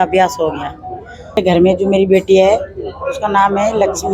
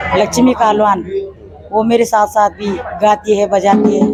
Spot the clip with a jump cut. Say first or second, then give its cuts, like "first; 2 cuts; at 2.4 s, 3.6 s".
first; 1 cut; at 1.4 s